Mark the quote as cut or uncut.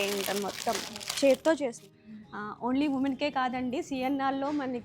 cut